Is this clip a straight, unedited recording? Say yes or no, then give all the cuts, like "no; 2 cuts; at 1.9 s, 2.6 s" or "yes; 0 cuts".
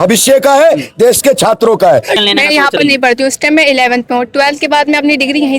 no; 1 cut; at 2.1 s